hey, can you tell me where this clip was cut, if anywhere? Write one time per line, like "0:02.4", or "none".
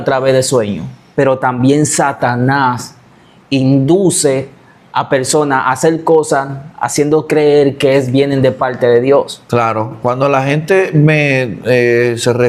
none